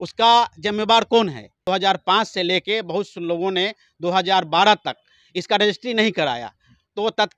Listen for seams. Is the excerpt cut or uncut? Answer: cut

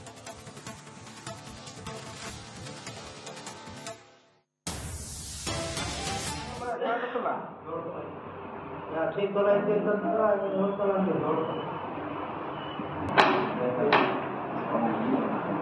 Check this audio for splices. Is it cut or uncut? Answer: uncut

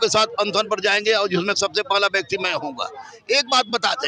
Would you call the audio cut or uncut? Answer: uncut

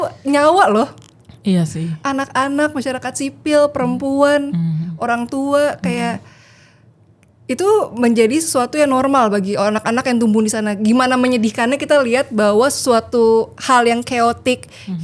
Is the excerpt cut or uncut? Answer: uncut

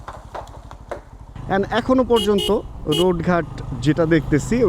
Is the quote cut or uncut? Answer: cut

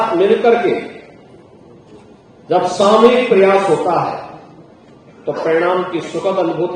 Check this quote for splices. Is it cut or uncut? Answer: uncut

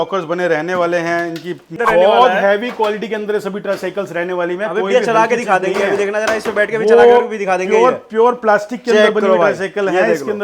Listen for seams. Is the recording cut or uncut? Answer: cut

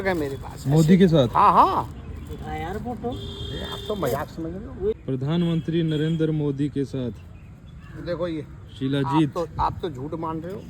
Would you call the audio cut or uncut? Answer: cut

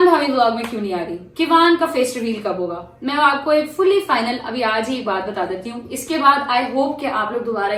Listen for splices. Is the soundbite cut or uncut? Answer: uncut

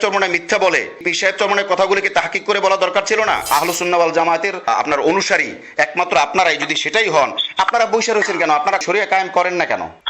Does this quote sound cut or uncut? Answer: cut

